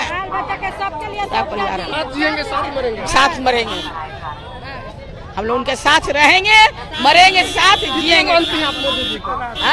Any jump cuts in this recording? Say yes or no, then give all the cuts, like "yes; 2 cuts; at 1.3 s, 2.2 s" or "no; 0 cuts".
no; 0 cuts